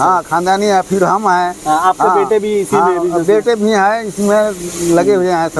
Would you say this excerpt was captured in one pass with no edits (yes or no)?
yes